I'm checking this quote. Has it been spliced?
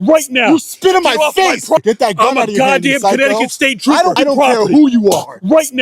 yes; 2 cuts; at 1.8 s, 4.2 s

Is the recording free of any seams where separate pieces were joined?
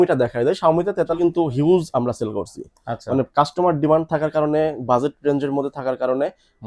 no; 1 cut; at 1.1 s

